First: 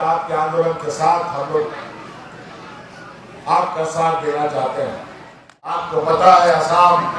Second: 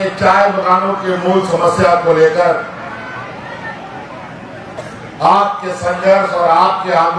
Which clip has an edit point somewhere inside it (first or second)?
first